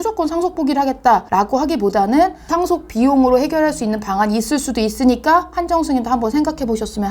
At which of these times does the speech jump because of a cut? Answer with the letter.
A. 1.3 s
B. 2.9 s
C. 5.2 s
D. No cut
A